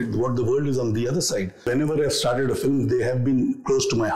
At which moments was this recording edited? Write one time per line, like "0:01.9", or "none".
0:01.7

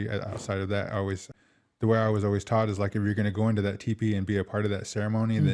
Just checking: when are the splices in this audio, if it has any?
0:01.3

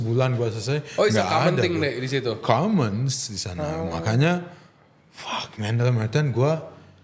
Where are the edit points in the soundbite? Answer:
none

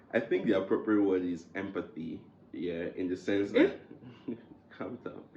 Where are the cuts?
none

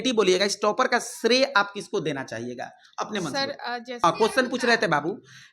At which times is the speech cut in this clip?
0:04.0

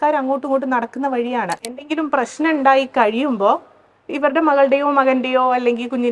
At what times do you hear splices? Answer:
0:01.8

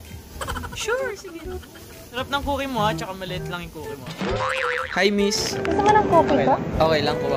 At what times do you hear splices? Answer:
0:02.1
0:04.8

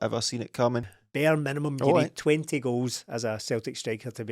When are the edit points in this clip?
0:01.0

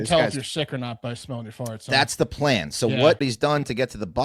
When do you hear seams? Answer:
0:03.2

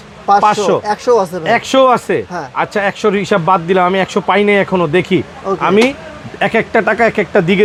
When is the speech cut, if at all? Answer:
none

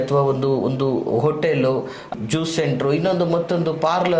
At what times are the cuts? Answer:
0:02.1

